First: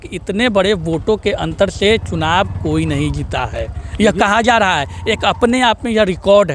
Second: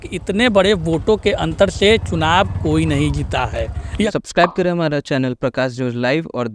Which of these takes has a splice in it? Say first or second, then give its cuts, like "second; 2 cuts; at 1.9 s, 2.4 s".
second; 1 cut; at 4.0 s